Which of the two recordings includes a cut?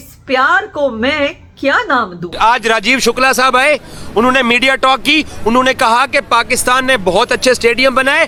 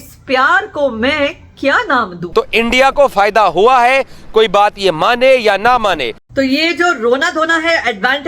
second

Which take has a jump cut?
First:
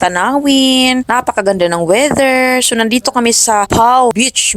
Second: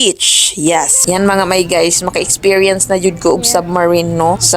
second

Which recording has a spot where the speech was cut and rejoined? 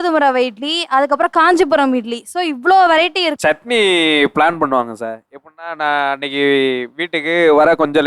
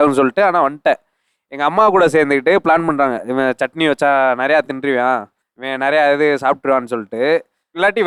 first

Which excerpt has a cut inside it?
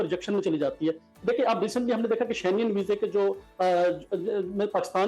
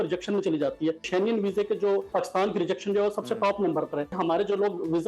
second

